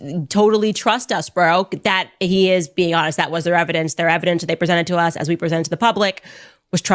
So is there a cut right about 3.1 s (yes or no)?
yes